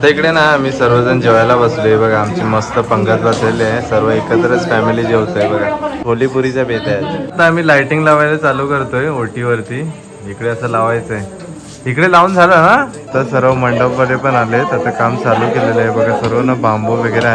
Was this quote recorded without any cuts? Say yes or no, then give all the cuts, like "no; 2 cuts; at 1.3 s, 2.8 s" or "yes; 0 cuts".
no; 3 cuts; at 6.0 s, 7.3 s, 13.1 s